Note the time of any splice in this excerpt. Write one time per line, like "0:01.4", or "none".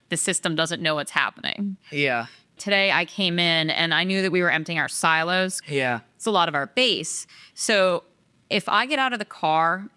0:02.5
0:05.6